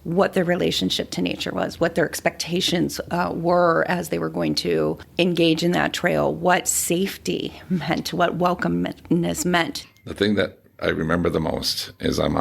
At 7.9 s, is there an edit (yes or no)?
no